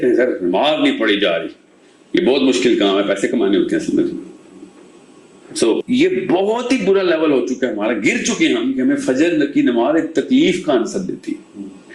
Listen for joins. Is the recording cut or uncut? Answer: cut